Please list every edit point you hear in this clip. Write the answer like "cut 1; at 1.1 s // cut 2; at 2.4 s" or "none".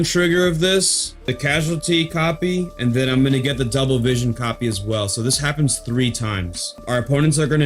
cut 1; at 1.1 s // cut 2; at 6.8 s